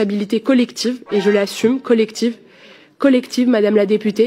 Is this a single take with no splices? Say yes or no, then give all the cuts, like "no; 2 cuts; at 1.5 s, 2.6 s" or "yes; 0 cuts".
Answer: yes; 0 cuts